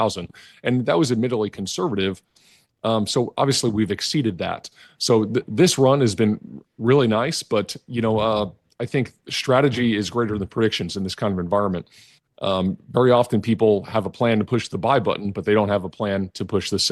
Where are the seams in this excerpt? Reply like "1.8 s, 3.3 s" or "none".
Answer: none

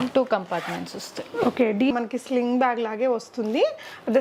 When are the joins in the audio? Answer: 1.9 s

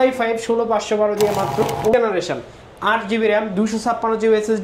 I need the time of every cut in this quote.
1.9 s

